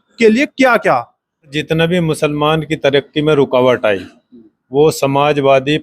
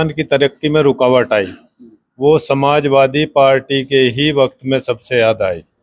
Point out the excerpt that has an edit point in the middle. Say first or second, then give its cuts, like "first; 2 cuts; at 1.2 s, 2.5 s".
first; 1 cut; at 1.6 s